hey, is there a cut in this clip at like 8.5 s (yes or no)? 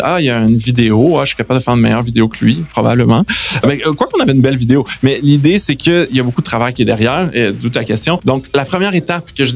yes